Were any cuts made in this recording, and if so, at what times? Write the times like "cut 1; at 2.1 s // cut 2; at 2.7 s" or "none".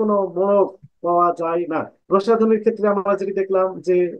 cut 1; at 1.9 s